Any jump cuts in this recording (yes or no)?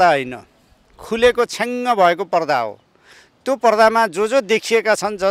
no